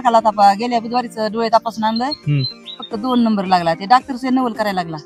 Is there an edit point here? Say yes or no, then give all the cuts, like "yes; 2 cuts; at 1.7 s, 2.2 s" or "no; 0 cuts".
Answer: no; 0 cuts